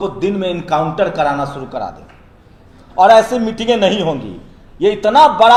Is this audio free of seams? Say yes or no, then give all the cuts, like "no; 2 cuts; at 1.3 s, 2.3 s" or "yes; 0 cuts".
yes; 0 cuts